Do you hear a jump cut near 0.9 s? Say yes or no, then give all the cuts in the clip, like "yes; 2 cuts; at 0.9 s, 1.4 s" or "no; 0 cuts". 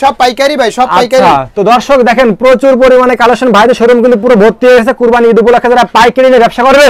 no; 0 cuts